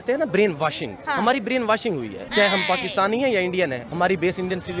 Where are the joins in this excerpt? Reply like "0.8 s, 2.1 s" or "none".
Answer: 0.9 s, 2.2 s, 3.9 s